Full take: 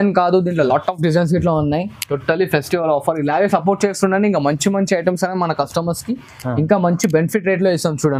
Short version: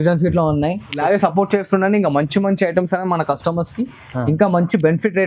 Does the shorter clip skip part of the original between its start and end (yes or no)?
yes